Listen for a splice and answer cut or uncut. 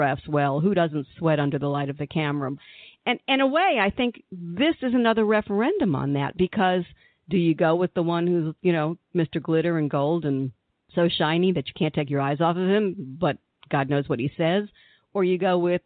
uncut